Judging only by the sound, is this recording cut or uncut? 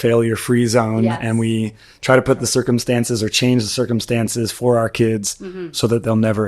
uncut